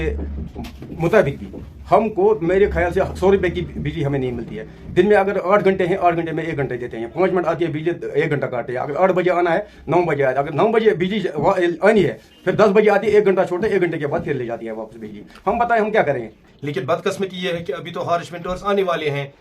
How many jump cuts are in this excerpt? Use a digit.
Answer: 1